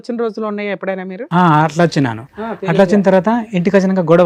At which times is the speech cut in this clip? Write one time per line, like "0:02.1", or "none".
none